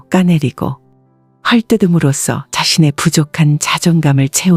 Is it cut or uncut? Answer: uncut